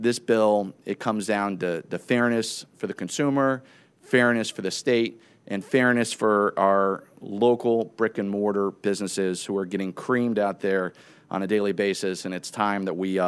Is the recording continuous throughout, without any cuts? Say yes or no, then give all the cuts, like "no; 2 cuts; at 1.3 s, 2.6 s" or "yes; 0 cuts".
yes; 0 cuts